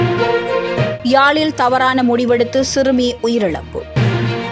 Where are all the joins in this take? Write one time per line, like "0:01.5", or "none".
none